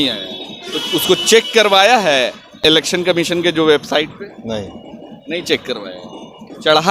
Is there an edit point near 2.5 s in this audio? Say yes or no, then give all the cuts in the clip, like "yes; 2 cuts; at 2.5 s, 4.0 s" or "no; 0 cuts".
yes; 1 cut; at 2.5 s